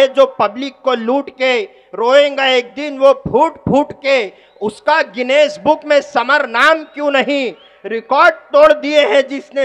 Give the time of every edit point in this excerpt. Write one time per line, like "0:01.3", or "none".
none

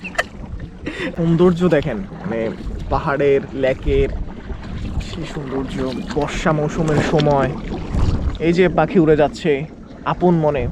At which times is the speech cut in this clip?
none

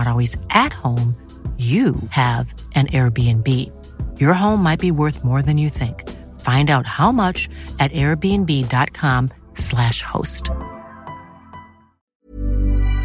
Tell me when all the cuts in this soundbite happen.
0:12.1

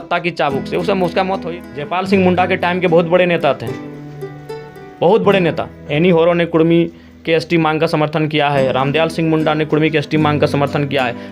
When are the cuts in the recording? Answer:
0:01.5

